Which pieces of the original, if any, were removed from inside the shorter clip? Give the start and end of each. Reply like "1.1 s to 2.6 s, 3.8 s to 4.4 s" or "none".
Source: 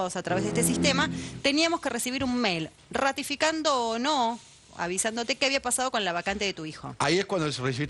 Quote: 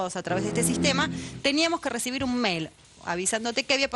2.8 s to 4.5 s